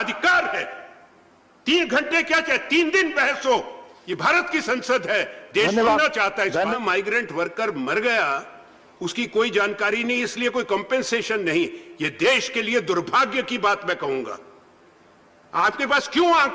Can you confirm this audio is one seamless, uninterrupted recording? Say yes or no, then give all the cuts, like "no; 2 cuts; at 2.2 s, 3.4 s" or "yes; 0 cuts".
no; 1 cut; at 6.8 s